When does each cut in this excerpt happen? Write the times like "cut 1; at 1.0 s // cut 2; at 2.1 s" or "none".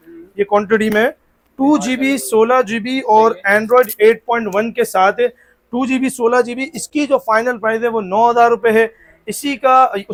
none